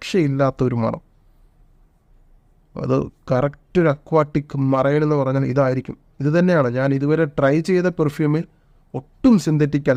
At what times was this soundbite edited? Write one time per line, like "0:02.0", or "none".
none